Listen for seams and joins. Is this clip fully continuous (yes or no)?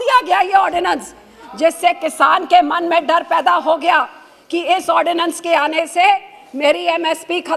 yes